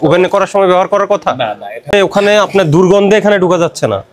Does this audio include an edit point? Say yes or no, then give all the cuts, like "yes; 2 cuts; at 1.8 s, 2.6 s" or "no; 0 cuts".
yes; 1 cut; at 1.9 s